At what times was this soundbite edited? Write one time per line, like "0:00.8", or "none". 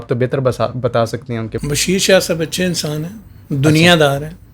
0:01.5